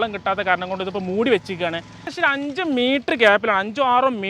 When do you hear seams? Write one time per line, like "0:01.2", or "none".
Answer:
0:02.1